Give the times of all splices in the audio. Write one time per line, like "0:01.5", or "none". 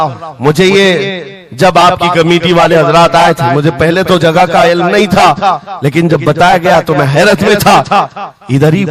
none